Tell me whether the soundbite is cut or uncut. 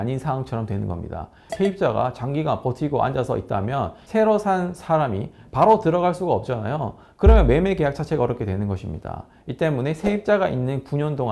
cut